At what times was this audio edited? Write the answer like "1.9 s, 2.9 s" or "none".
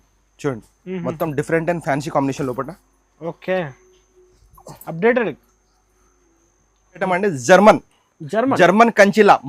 7.0 s